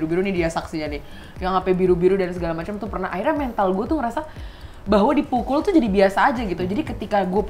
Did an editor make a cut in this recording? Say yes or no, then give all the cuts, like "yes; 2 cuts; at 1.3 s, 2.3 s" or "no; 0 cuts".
no; 0 cuts